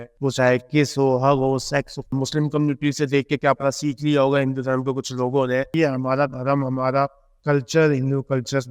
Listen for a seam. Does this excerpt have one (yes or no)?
yes